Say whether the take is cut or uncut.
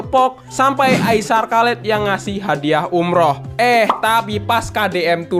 uncut